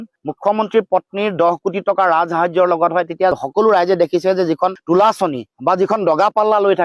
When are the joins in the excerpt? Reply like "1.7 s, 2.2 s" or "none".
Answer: none